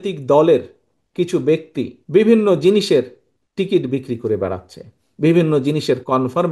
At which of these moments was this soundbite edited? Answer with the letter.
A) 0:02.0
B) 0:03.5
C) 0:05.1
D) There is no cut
A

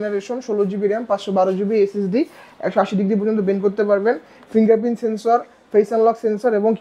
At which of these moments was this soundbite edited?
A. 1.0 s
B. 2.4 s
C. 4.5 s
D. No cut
D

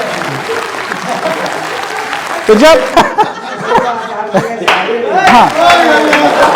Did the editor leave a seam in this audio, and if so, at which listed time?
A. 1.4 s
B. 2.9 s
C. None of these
B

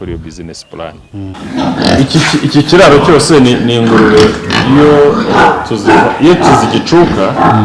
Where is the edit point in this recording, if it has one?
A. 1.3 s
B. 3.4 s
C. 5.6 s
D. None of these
A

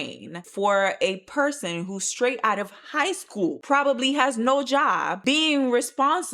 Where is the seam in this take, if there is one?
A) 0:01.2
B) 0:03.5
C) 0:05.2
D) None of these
C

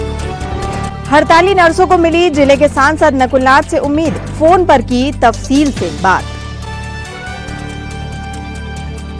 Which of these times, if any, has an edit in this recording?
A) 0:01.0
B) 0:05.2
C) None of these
C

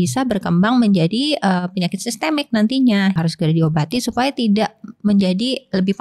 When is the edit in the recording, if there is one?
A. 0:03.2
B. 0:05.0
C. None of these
A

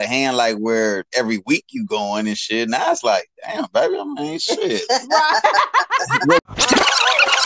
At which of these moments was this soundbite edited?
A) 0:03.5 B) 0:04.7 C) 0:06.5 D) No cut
C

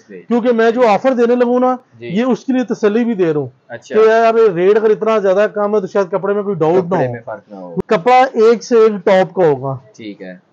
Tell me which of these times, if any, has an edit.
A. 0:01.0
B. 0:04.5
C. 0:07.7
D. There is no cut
C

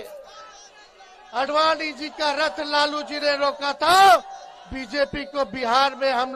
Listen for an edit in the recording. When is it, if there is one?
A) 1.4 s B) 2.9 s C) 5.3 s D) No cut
D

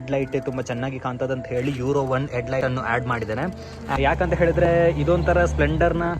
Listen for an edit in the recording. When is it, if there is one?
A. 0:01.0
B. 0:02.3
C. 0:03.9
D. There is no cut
C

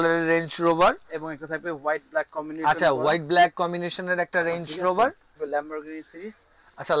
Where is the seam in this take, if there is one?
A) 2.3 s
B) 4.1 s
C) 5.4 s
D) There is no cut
C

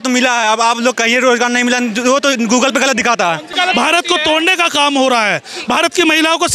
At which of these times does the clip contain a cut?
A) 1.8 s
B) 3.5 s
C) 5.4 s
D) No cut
B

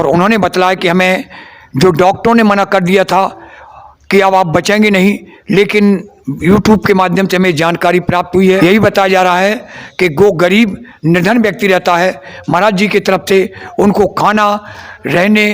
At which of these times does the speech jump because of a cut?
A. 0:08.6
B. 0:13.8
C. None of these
A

